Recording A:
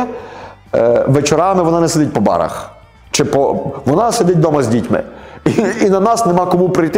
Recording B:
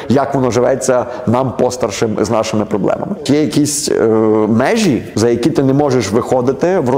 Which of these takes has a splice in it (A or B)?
B